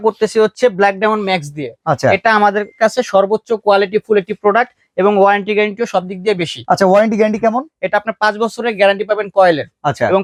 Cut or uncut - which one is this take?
uncut